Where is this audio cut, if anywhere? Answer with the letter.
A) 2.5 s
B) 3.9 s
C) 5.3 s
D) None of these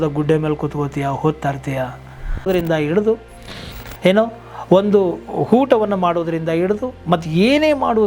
A